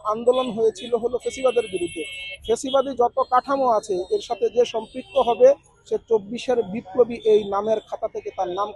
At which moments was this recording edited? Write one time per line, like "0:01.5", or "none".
none